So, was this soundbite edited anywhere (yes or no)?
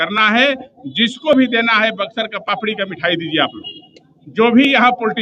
no